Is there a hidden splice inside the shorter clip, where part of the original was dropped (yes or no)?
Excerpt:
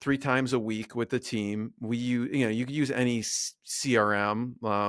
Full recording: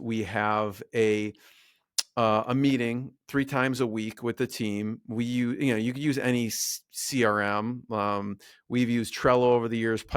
no